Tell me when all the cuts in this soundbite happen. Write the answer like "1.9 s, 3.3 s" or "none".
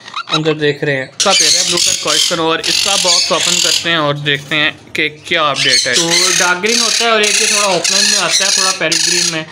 1.2 s, 5.9 s